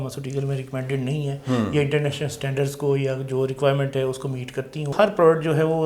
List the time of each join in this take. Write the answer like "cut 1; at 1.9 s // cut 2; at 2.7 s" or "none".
cut 1; at 4.9 s